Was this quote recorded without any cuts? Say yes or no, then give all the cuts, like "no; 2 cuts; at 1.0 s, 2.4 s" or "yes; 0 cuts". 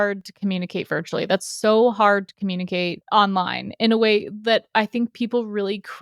no; 1 cut; at 3.0 s